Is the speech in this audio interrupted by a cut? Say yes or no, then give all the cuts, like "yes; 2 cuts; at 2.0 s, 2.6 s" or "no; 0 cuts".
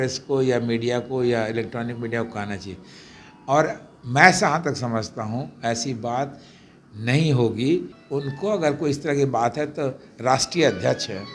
yes; 1 cut; at 8.0 s